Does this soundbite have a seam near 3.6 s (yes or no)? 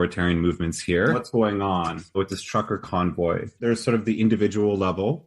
yes